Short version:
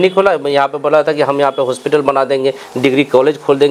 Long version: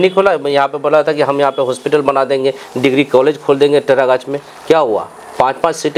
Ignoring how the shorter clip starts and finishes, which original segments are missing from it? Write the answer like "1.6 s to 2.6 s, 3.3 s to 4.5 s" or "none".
none